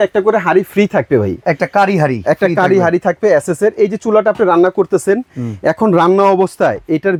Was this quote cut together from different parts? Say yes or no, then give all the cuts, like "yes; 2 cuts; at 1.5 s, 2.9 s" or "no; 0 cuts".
no; 0 cuts